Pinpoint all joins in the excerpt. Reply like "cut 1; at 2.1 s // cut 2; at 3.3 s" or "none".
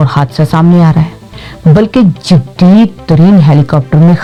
none